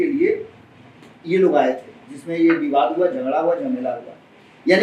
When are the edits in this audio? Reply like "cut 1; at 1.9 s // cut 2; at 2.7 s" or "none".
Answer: none

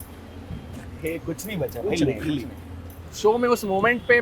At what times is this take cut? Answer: cut 1; at 3.0 s

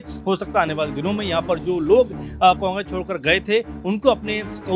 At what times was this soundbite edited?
none

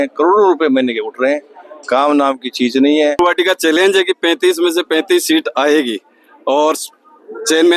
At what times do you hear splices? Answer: cut 1; at 3.2 s

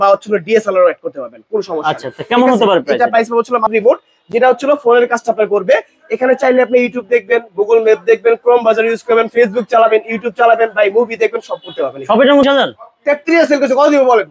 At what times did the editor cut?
cut 1; at 3.7 s // cut 2; at 12.4 s

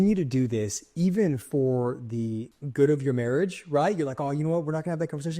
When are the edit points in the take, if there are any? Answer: cut 1; at 2.6 s

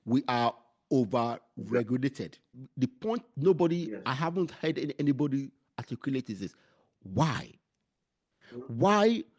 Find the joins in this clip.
cut 1; at 2.6 s

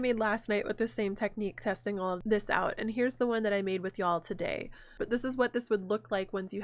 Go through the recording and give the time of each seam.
cut 1; at 2.2 s // cut 2; at 4.9 s

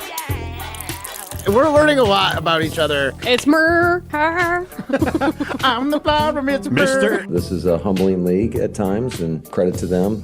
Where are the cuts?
cut 1; at 1.5 s

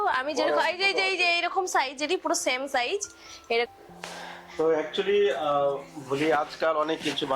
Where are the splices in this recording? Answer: cut 1; at 3.7 s

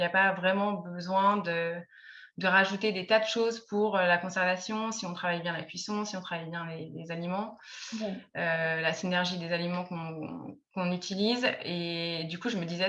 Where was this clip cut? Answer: none

